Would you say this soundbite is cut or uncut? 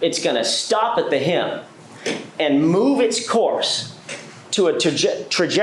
uncut